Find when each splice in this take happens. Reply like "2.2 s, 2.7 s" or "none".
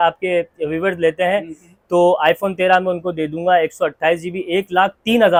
none